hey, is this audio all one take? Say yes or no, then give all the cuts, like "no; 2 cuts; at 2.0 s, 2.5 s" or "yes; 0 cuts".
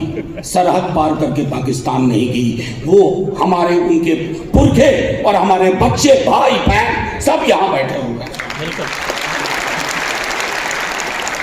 yes; 0 cuts